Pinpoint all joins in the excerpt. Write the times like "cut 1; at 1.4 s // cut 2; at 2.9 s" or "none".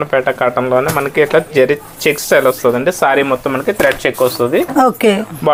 none